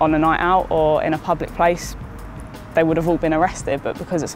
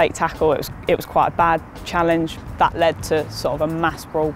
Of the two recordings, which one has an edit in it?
second; 2 cuts; at 2.5 s, 3.6 s

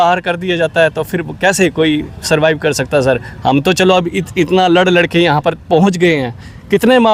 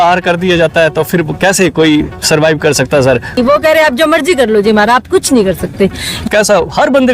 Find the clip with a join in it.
second; 2 cuts; at 3.4 s, 6.1 s

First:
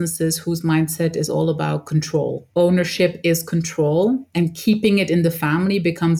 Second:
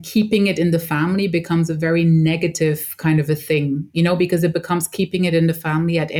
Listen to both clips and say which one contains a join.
first; 1 cut; at 2.4 s

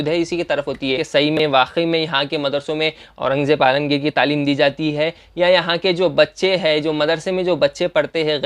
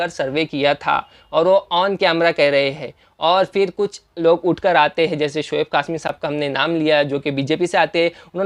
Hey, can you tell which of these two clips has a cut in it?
first; 1 cut; at 1.0 s

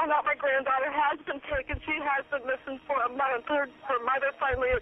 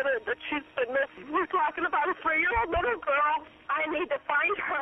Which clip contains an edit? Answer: second; 2 cuts; at 1.1 s, 3.4 s

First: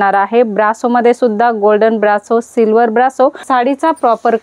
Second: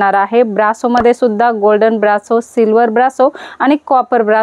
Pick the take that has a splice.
first; 1 cut; at 3.4 s

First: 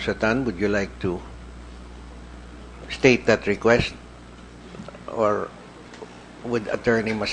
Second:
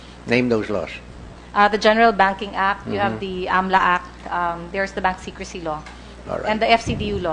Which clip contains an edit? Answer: first; 1 cut; at 5.1 s

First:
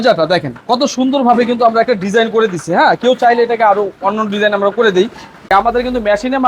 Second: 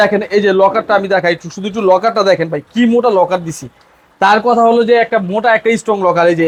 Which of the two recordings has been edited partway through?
first; 1 cut; at 5.5 s

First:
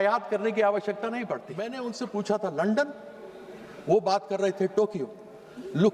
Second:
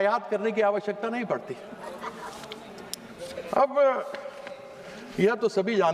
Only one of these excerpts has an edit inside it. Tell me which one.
first; 1 cut; at 1.8 s

